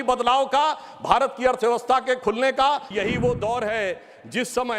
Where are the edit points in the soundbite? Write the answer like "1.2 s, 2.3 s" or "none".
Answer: 2.9 s